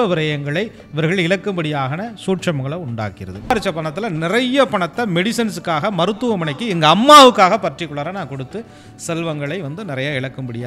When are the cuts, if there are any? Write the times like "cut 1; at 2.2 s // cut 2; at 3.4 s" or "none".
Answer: cut 1; at 3.5 s